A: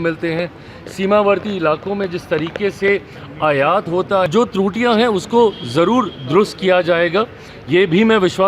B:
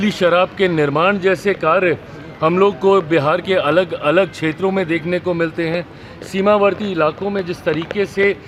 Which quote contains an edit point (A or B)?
A